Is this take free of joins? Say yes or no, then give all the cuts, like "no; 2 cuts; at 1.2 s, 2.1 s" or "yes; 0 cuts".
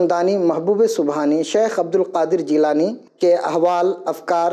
no; 1 cut; at 3.0 s